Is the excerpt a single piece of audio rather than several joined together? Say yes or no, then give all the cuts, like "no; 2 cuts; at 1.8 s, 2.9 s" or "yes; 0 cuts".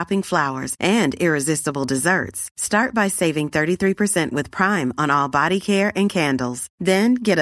yes; 0 cuts